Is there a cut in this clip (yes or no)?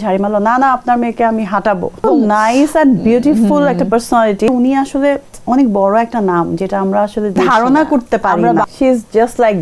yes